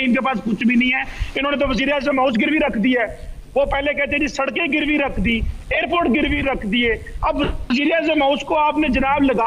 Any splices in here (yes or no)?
no